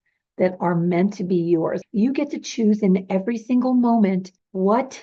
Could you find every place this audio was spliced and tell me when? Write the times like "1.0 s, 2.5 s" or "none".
1.8 s

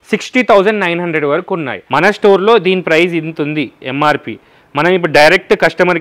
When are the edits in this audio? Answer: 1.8 s

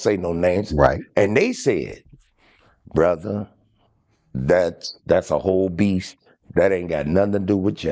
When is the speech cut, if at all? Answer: none

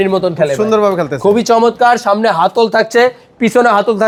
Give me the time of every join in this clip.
none

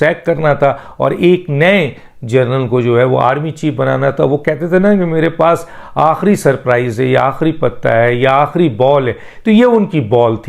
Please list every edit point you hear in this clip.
none

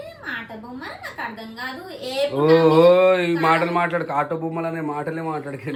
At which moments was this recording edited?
none

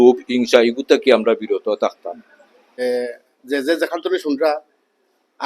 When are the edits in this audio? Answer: 2.8 s

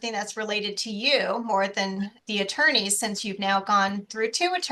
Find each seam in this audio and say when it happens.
2.2 s

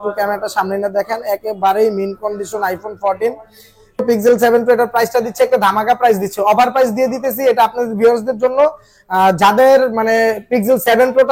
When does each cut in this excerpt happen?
4.0 s

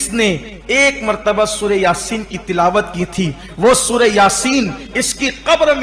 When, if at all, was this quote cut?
none

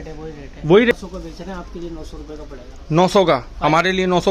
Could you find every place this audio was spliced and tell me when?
0.9 s

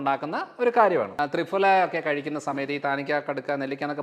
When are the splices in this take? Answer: 1.1 s

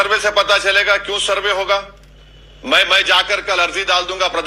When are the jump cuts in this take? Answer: none

